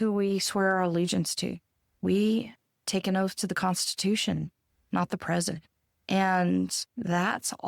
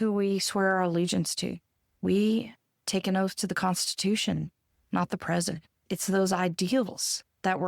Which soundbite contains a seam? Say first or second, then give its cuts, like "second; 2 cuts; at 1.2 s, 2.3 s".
second; 1 cut; at 5.9 s